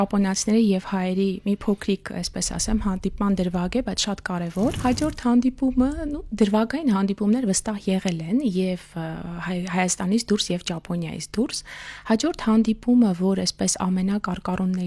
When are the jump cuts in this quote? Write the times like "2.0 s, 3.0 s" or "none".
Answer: 4.8 s